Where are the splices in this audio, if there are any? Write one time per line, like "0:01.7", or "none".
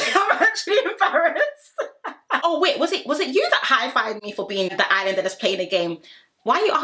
0:02.4
0:04.7